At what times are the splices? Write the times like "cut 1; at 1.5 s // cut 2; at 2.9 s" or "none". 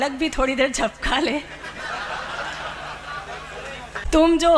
none